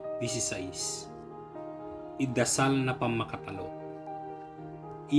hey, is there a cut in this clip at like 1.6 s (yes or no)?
no